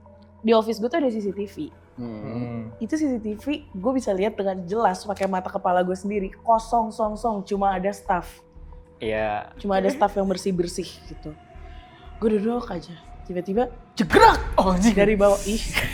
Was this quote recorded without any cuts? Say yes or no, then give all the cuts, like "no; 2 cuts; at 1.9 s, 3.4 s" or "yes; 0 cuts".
yes; 0 cuts